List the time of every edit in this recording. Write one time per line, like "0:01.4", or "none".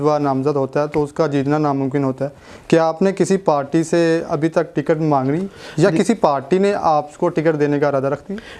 none